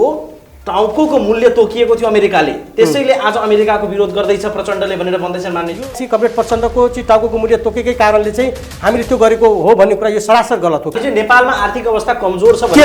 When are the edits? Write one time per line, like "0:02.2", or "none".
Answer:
0:05.8
0:10.9